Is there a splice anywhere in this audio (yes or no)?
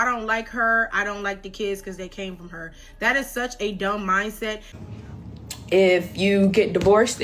yes